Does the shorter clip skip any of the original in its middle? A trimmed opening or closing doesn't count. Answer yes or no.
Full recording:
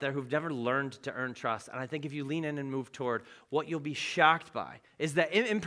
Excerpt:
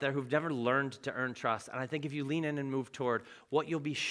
no